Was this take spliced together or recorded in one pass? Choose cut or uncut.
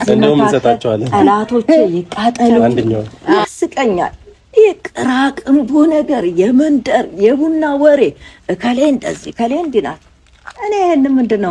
cut